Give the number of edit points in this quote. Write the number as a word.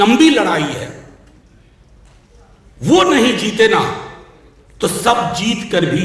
zero